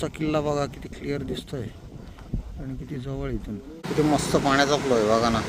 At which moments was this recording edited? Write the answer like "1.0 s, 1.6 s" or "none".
3.8 s